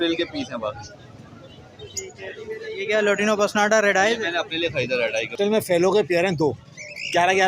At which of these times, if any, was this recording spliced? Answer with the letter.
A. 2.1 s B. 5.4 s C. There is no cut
B